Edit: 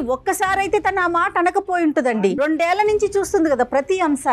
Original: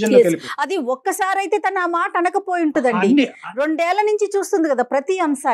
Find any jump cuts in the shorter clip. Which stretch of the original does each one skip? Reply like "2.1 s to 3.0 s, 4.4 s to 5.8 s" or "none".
3.1 s to 3.5 s